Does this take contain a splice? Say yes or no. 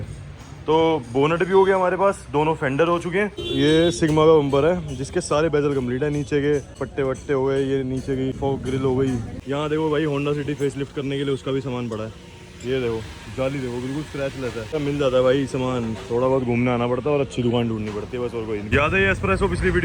yes